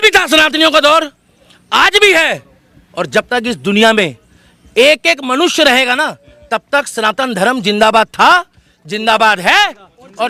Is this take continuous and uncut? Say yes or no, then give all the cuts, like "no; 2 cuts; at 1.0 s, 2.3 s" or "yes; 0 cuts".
yes; 0 cuts